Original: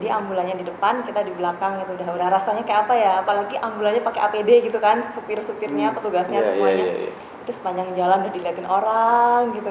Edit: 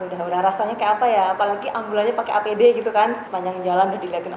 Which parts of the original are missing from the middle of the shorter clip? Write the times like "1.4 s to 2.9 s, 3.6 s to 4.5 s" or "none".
5.1 s to 7.6 s